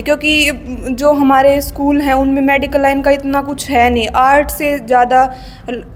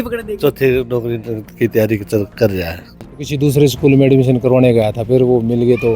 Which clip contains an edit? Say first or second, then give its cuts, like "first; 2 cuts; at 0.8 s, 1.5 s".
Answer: second; 1 cut; at 3.1 s